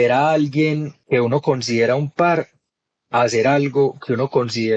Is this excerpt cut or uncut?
cut